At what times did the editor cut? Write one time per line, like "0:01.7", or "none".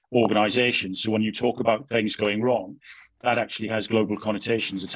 none